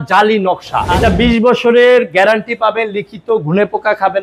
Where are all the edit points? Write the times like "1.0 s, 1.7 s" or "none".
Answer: 0.9 s